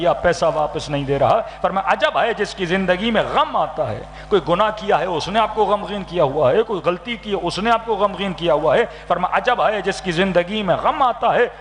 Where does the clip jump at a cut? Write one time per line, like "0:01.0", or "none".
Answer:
none

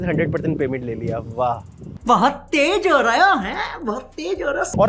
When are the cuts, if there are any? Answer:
none

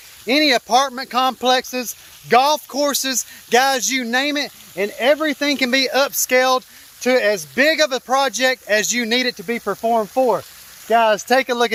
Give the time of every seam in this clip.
none

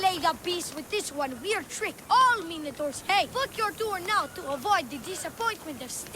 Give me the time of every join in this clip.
0:03.3

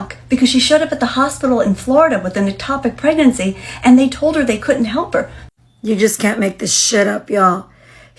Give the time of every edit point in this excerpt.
0:05.4

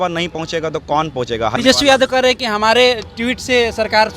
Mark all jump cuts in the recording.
0:01.5

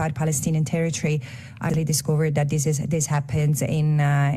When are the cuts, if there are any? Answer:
0:01.7

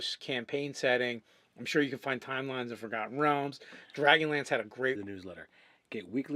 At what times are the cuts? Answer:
none

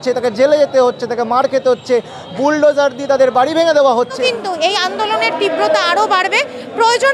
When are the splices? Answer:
0:04.1

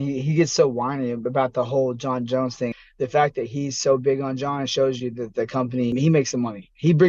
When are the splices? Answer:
0:02.8
0:05.9

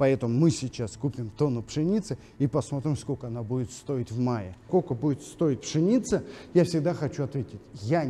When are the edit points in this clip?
0:04.7

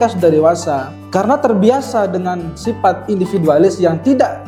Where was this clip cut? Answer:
none

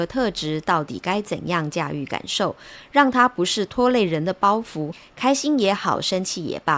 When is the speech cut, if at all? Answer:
0:05.0

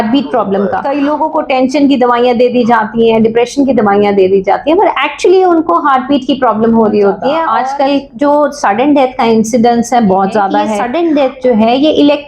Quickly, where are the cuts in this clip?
0:00.8
0:07.5
0:10.8

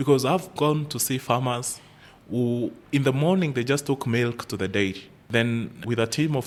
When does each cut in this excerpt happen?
none

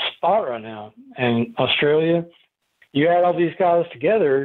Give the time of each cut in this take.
none

